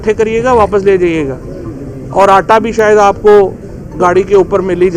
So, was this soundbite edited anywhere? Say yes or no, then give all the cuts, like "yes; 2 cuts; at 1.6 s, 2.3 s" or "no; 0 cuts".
no; 0 cuts